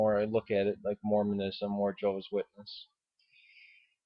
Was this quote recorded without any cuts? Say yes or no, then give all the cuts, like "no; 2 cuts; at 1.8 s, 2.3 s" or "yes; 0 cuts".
yes; 0 cuts